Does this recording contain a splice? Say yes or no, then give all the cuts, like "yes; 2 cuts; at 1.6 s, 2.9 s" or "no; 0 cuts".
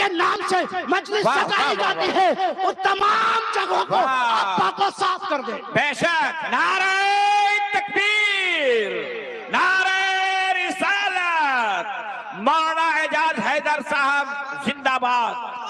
no; 0 cuts